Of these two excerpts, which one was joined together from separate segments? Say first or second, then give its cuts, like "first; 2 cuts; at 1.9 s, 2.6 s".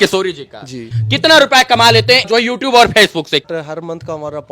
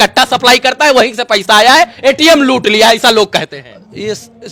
first; 3 cuts; at 0.9 s, 2.3 s, 3.5 s